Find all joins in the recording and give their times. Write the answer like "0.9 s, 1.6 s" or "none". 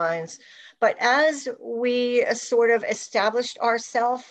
none